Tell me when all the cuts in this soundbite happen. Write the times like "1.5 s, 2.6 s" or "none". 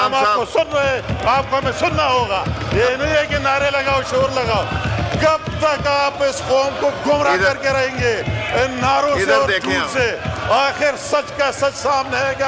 none